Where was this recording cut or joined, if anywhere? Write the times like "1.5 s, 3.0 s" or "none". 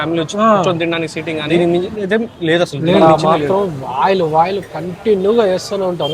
1.4 s, 3.0 s